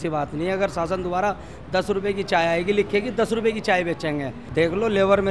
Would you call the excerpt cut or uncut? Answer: cut